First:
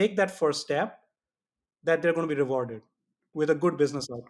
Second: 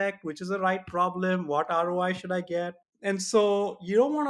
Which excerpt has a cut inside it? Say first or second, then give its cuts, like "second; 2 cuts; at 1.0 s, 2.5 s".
second; 1 cut; at 2.8 s